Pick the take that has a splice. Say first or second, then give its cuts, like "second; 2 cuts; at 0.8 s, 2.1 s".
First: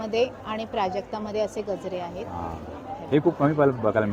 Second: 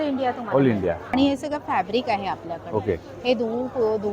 second; 1 cut; at 1.0 s